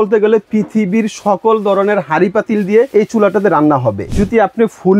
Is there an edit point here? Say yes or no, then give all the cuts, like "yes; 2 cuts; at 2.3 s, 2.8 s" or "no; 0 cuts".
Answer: yes; 2 cuts; at 2.9 s, 4.1 s